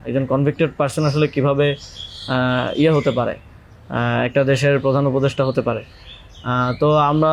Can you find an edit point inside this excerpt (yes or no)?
no